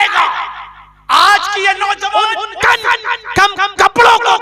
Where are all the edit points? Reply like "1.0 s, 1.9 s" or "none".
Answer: 2.4 s